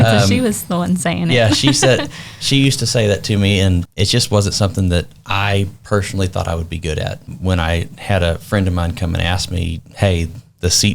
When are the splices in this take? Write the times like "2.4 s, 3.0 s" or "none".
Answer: 3.9 s, 7.3 s